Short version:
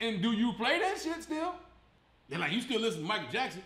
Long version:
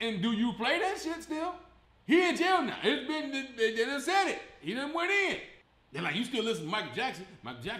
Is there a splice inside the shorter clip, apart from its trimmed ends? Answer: yes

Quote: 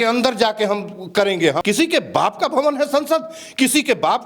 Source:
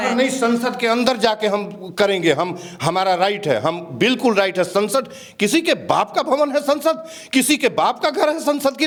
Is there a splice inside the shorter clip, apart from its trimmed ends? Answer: yes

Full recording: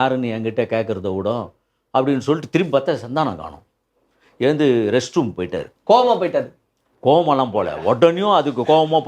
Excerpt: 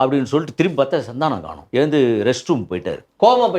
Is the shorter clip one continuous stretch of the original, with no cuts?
no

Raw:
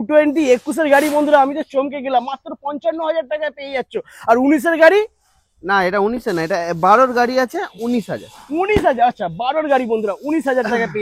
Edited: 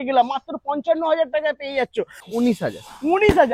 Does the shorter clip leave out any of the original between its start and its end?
yes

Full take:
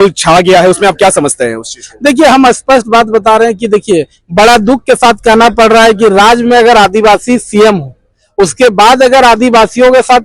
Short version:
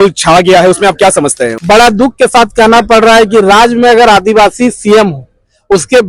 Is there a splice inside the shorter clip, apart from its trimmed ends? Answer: yes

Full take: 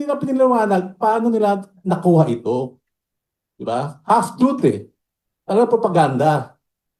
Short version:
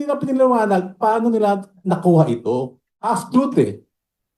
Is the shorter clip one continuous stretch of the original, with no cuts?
no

